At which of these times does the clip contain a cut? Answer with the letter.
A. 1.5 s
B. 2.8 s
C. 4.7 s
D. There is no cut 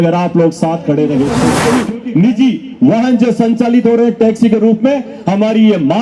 A